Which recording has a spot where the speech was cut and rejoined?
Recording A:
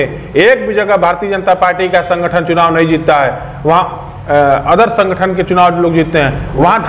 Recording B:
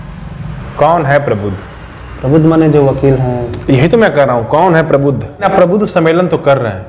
B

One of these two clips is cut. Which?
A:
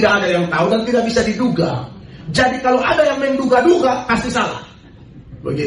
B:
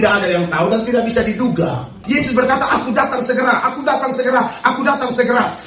B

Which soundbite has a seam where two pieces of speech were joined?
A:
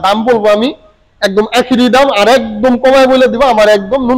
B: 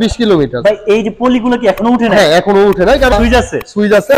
B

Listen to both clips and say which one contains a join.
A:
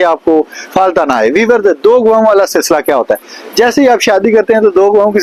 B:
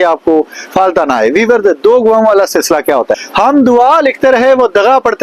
B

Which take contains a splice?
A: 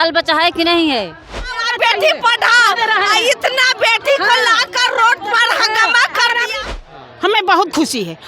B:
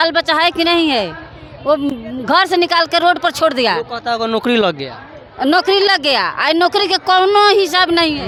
A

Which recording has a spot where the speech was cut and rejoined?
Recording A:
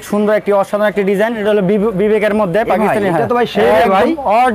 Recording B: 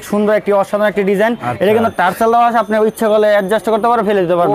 A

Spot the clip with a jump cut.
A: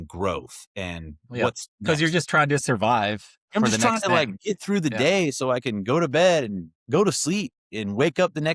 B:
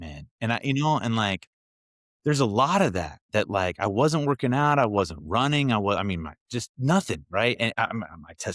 A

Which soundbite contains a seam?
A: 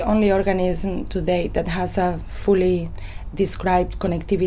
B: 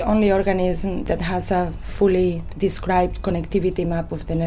B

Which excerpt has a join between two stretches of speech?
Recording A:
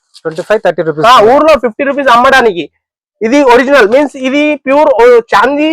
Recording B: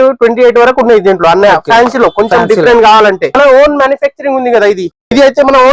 B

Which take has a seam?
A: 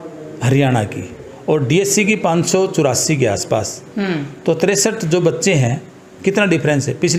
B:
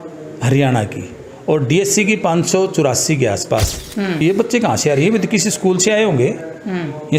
B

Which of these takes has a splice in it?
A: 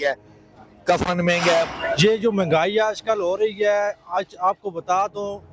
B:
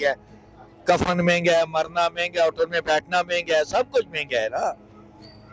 A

